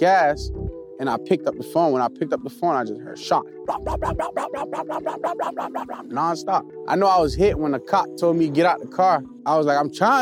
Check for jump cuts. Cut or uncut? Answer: cut